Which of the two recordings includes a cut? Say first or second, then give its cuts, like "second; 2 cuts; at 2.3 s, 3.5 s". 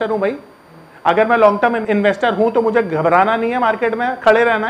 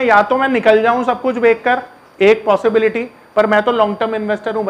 first; 1 cut; at 1.8 s